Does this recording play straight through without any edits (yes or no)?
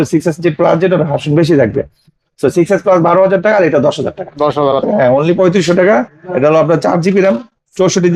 no